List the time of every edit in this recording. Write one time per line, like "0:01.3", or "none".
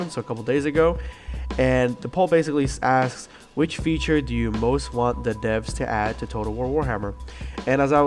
0:04.9